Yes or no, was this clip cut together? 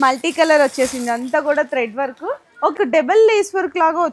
yes